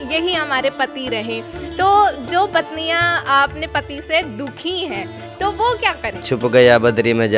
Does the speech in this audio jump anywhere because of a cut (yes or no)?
yes